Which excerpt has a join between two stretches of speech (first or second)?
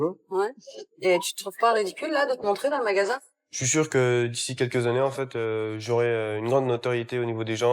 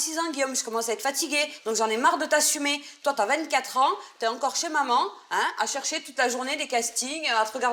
first